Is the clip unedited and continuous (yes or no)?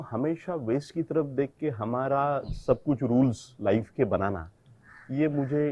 yes